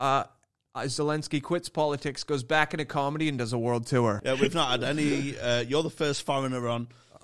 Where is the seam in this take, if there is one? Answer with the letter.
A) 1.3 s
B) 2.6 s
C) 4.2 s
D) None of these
C